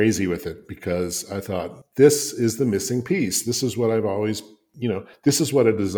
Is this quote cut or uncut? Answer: uncut